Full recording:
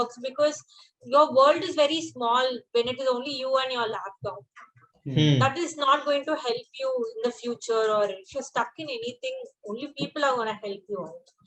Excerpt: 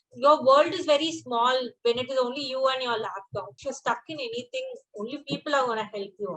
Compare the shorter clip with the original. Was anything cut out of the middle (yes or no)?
yes